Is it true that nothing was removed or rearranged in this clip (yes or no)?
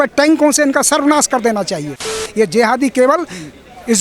no